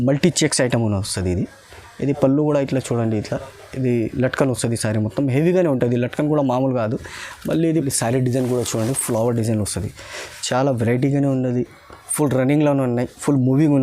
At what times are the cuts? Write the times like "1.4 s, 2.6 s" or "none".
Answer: 7.8 s